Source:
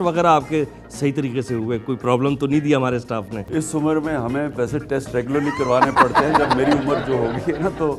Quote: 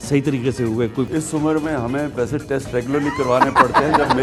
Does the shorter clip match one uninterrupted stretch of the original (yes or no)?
no